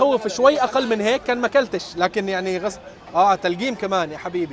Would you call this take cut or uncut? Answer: uncut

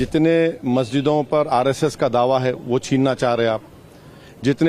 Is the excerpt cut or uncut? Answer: uncut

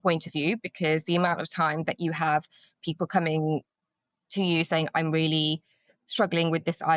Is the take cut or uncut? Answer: uncut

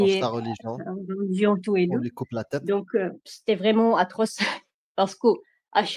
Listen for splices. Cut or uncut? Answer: cut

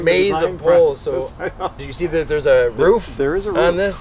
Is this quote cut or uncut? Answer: uncut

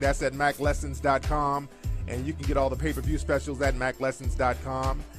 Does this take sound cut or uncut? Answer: cut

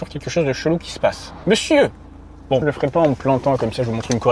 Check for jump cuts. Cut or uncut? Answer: cut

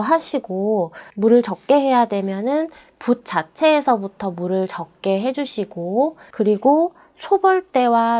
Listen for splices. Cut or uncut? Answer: uncut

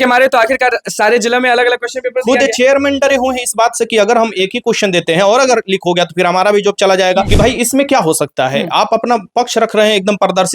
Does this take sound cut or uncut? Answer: cut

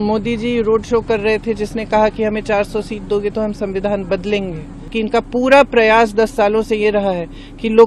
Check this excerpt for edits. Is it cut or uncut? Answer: cut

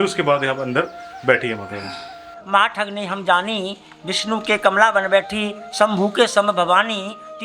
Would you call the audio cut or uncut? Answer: cut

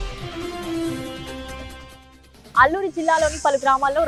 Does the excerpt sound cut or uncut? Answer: uncut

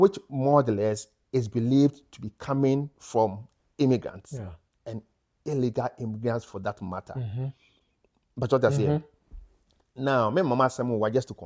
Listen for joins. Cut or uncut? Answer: uncut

